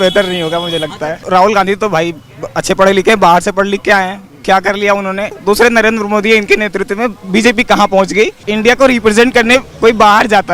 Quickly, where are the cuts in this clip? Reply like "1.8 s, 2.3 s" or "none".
1.2 s, 5.4 s, 8.4 s